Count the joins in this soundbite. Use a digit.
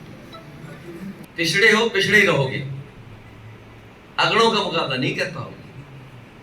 1